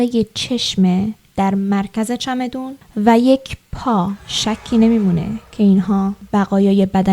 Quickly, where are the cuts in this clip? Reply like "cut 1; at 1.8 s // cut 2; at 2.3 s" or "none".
cut 1; at 4.3 s // cut 2; at 6.2 s